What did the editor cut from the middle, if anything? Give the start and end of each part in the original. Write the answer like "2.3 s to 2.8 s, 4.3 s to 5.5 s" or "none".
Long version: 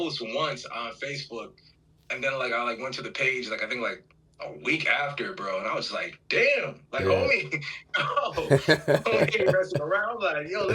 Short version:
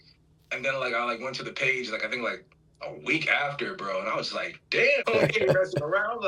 6.6 s to 9.0 s